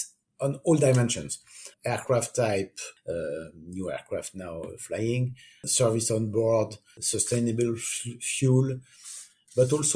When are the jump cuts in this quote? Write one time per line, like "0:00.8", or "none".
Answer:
0:01.6